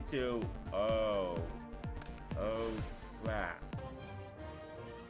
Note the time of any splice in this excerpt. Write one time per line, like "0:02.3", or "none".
0:03.8